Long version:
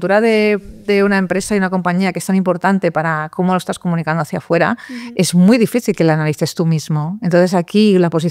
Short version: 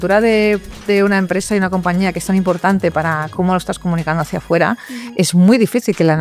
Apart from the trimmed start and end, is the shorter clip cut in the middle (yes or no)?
no